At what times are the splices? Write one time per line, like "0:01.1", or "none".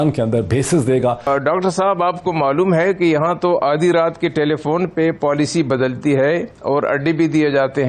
0:01.3